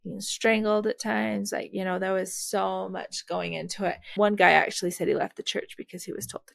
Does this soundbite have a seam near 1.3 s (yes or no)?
no